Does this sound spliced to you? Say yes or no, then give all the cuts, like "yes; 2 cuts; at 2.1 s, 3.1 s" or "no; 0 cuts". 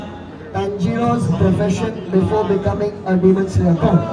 no; 0 cuts